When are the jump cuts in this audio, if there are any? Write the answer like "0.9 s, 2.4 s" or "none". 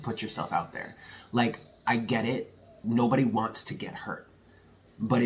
none